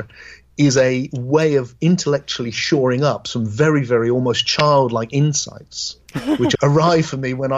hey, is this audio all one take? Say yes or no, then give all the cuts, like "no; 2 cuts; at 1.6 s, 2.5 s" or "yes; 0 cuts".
no; 1 cut; at 6.5 s